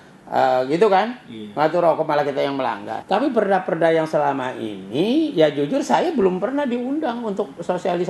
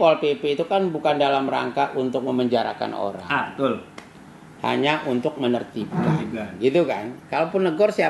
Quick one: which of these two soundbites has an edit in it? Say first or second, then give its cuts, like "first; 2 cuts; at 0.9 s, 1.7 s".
first; 1 cut; at 2.9 s